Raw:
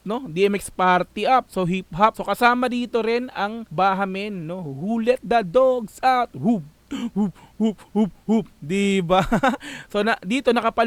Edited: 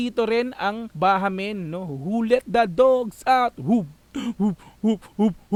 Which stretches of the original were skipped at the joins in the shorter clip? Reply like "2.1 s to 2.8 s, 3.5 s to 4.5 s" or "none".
none